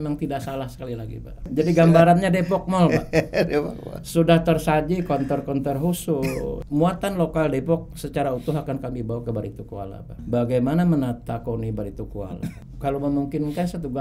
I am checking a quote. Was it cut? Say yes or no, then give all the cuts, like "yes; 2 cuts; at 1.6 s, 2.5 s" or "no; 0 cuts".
yes; 4 cuts; at 1.5 s, 6.6 s, 10.2 s, 12.7 s